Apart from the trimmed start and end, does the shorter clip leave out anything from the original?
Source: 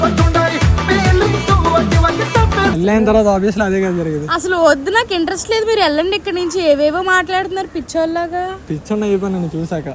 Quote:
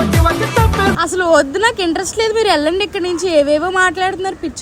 yes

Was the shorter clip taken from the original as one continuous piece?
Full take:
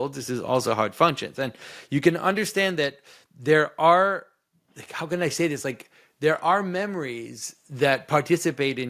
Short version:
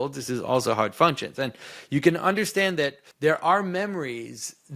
no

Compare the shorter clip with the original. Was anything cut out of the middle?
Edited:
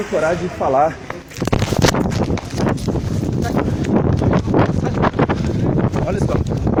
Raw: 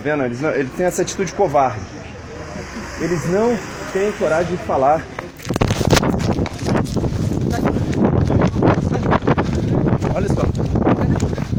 no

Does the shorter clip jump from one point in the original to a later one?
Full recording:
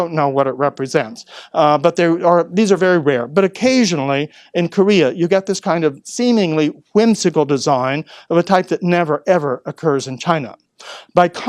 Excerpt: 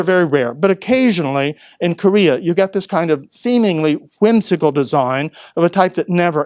no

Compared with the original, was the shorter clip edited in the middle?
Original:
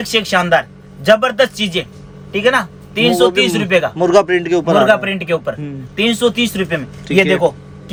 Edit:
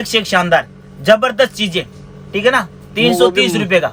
no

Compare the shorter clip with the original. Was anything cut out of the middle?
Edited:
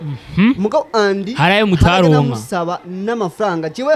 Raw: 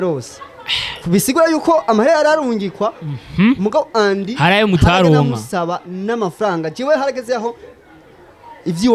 no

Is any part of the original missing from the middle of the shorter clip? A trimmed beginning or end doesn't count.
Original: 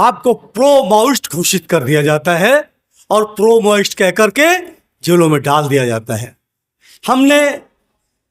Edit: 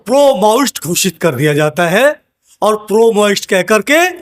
no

